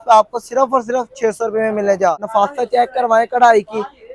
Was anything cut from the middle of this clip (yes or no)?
yes